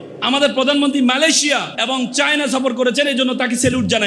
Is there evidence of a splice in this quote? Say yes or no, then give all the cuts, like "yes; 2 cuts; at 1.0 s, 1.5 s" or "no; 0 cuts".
yes; 1 cut; at 1.7 s